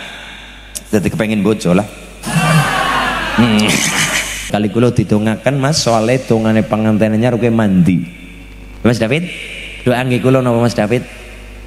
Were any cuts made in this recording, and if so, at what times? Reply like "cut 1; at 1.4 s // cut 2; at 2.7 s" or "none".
cut 1; at 4.5 s